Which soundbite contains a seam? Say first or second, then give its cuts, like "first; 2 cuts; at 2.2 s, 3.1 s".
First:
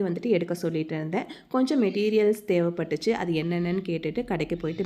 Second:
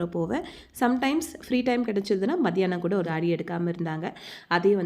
second; 1 cut; at 3.1 s